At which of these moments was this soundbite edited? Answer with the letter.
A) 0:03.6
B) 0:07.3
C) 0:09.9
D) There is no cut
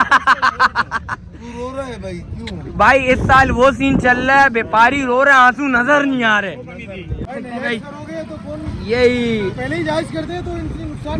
B